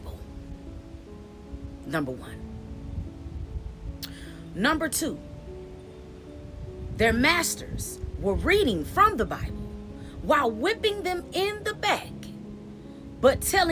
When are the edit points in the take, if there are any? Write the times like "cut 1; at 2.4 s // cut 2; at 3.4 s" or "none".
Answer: none